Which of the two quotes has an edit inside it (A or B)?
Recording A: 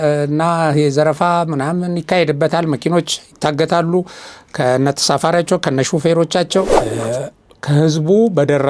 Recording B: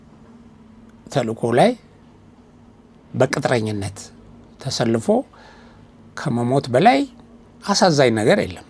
A